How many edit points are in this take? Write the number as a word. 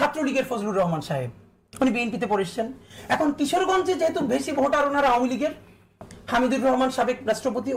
zero